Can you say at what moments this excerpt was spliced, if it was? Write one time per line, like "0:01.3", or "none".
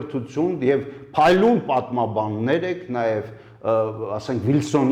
none